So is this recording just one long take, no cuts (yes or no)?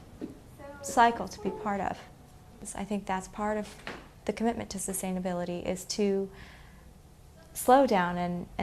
yes